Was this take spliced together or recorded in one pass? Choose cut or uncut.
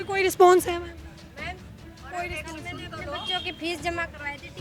uncut